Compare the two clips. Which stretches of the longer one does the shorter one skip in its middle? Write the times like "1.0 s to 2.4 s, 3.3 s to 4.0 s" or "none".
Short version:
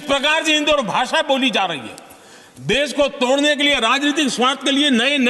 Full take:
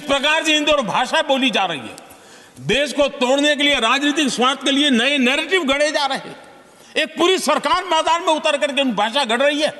none